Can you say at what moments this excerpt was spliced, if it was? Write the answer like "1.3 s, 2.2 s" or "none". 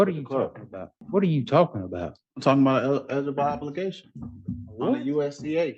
1.0 s